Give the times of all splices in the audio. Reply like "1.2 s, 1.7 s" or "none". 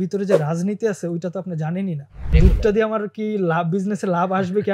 2.3 s